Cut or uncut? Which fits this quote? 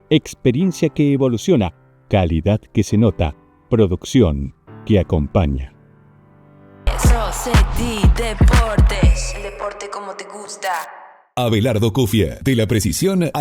cut